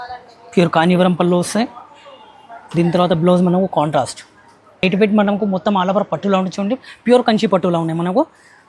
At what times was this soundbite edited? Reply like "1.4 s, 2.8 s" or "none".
4.8 s